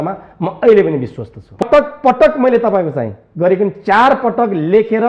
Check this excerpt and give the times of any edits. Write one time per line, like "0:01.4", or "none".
0:01.6